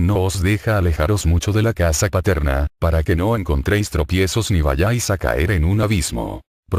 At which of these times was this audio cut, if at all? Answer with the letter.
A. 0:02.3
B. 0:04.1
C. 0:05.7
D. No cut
D